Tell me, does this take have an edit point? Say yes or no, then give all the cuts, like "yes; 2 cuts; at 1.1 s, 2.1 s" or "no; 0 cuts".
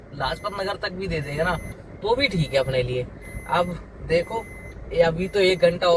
no; 0 cuts